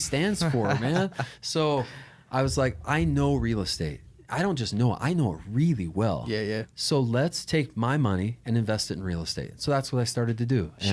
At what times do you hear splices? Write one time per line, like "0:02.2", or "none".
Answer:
none

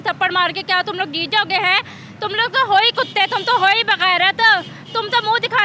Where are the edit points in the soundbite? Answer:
none

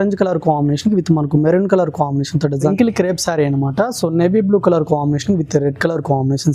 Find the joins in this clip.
0:02.7

